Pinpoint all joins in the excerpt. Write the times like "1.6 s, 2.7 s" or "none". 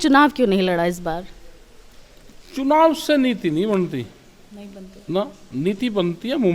none

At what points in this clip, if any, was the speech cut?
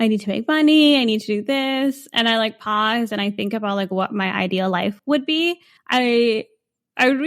5.0 s, 5.7 s

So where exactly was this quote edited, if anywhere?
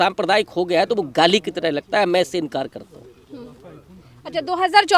none

